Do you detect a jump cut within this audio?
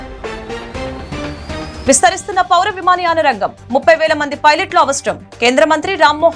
yes; 1 cut; at 1.8 s

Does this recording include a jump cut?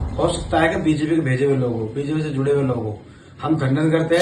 no; 0 cuts

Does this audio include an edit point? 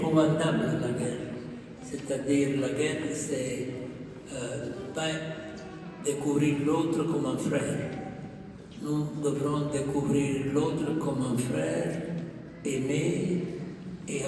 no; 0 cuts

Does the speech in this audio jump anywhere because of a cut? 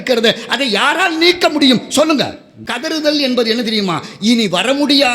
yes; 1 cut; at 2.8 s

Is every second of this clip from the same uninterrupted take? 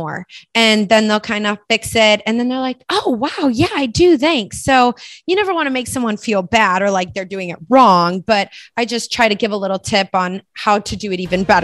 yes; 0 cuts

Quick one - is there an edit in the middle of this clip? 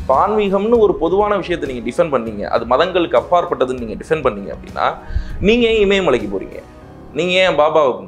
no; 0 cuts

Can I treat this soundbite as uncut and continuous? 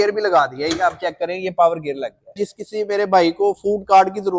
no; 1 cut; at 2.3 s

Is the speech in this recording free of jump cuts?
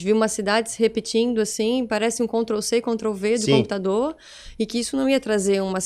yes; 0 cuts

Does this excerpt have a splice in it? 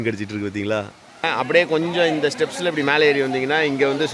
yes; 1 cut; at 1.3 s

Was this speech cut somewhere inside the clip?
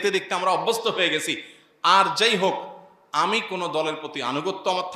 no; 0 cuts

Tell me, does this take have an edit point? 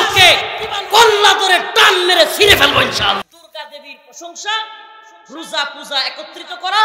yes; 1 cut; at 3.2 s

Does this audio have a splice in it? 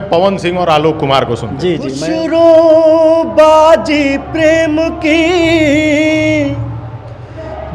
yes; 1 cut; at 2.0 s

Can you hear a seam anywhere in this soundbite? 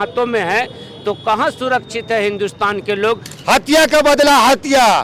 yes; 1 cut; at 3.3 s

